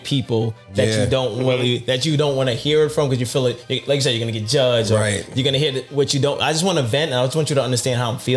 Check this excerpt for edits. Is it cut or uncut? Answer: uncut